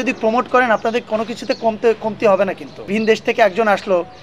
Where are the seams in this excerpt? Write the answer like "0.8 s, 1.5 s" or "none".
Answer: 2.9 s